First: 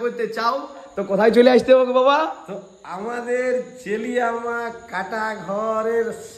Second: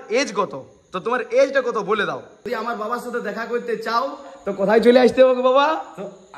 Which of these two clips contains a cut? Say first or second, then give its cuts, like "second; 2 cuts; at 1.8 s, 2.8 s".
second; 1 cut; at 2.5 s